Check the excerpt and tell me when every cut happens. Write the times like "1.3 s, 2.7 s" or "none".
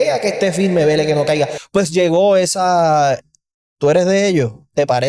none